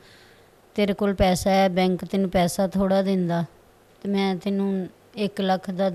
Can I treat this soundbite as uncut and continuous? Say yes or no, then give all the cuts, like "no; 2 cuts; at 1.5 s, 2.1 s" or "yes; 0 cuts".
yes; 0 cuts